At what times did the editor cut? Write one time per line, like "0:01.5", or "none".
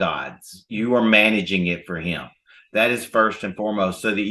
none